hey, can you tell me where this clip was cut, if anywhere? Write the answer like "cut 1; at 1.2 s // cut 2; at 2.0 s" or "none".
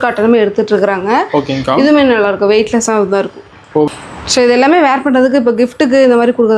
cut 1; at 3.9 s